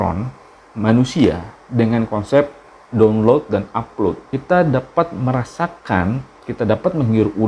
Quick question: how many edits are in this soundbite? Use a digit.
1